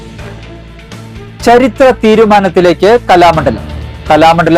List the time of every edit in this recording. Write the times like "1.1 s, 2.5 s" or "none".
1.1 s